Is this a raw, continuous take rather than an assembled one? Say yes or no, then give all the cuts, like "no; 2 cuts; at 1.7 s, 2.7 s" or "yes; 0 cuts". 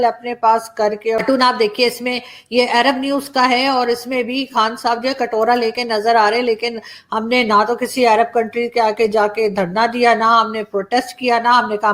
no; 1 cut; at 1.2 s